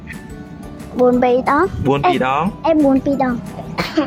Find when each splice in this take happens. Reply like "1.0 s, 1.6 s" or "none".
none

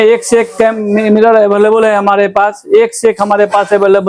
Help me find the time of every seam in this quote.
none

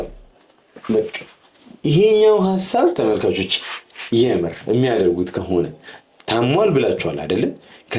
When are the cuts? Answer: none

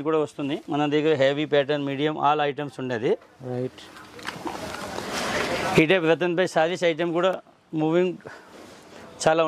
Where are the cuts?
none

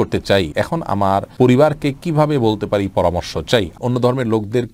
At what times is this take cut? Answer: 0.9 s, 3.8 s

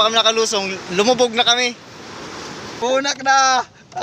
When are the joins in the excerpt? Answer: 2.7 s

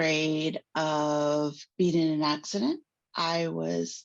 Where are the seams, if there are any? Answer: 1.6 s

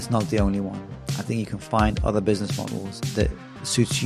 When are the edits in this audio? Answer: 3.0 s

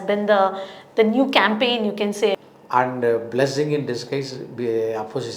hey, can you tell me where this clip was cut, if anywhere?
2.4 s

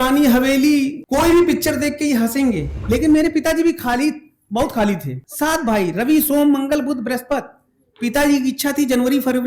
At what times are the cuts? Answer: 1.0 s, 2.7 s, 5.2 s

